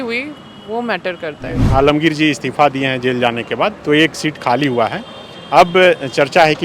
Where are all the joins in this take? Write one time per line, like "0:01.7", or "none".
0:01.7